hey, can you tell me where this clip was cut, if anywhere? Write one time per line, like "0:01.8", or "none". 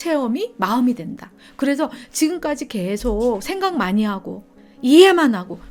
none